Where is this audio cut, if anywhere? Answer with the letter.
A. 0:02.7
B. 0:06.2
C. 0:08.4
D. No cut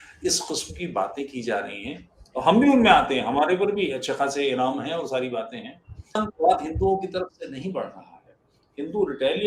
B